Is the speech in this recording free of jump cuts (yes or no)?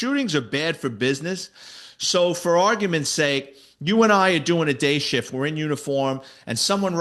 yes